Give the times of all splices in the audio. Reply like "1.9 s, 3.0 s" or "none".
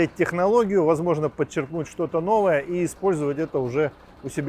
none